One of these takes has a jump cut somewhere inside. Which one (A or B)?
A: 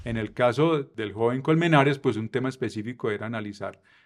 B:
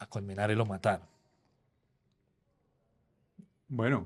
A